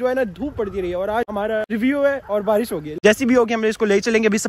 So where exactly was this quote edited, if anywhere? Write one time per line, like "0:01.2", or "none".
0:01.5
0:02.8